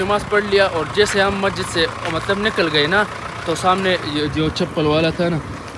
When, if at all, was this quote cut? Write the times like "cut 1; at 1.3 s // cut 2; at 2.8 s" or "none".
none